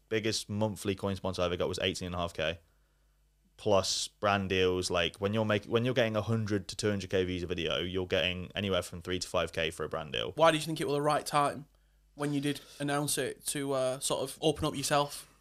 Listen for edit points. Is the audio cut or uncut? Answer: cut